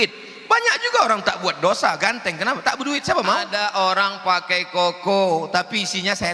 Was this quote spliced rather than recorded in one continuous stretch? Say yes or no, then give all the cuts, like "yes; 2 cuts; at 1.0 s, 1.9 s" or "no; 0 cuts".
yes; 1 cut; at 3.5 s